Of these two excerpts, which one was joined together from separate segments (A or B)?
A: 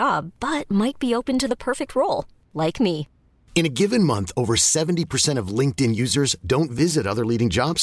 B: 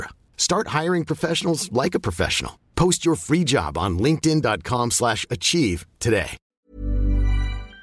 B